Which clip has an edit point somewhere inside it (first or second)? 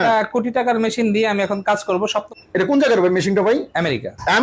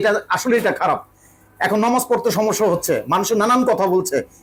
first